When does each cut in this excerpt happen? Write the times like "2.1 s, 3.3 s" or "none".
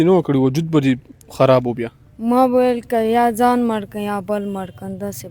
none